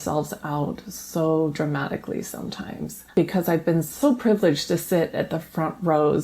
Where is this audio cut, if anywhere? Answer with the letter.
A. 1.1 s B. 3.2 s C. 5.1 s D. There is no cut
B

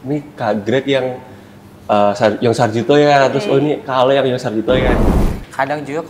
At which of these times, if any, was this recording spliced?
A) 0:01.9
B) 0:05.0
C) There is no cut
B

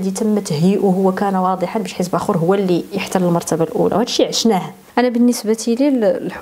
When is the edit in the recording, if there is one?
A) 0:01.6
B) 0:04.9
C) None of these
B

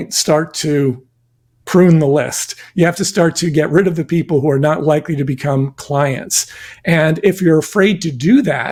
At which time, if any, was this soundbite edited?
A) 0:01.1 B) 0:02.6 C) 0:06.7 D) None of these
D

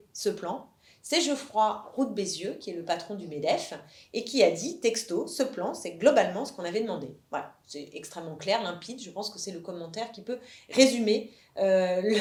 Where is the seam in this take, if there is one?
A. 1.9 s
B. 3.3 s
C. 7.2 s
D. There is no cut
D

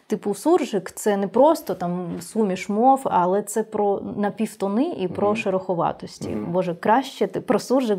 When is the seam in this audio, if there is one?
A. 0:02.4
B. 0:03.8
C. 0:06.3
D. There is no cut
D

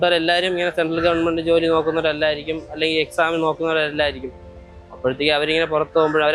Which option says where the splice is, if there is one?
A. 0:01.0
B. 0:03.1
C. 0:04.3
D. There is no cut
D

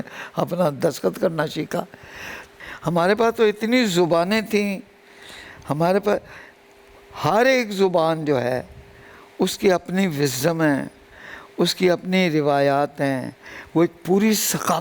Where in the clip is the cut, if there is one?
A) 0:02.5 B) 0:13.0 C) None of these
A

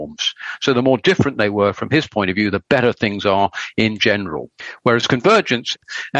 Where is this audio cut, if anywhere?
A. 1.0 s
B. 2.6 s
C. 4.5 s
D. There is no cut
C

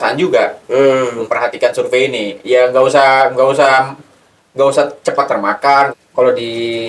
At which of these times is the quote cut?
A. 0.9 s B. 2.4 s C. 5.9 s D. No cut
C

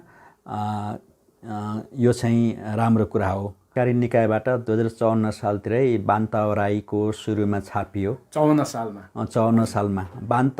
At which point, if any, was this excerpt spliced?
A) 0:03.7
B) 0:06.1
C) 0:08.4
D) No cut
A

